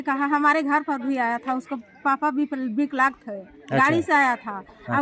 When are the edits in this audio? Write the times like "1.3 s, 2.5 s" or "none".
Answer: none